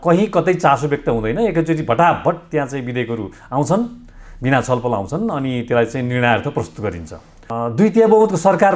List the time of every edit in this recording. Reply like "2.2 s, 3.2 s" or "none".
7.5 s